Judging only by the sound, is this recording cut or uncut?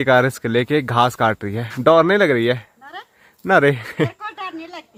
uncut